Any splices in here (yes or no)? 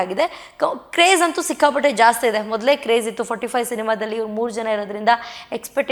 no